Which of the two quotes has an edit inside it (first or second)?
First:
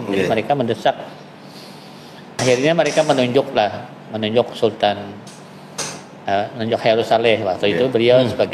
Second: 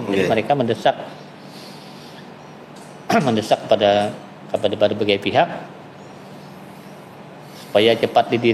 first